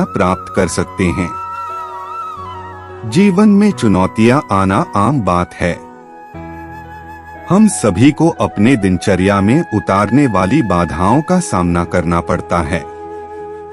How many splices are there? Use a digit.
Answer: 2